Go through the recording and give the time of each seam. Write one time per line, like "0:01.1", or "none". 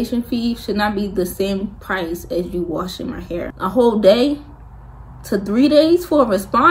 0:03.5